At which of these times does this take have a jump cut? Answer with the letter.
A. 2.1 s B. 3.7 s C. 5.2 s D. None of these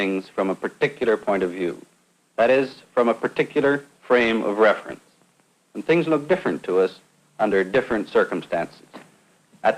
B